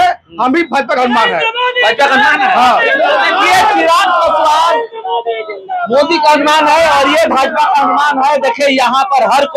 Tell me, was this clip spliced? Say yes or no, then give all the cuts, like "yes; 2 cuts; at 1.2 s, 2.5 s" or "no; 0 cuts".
no; 0 cuts